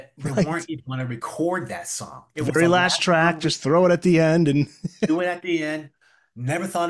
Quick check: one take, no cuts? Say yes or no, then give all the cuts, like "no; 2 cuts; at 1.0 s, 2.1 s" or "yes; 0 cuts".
yes; 0 cuts